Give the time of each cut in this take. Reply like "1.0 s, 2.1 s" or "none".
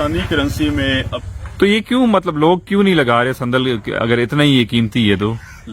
1.1 s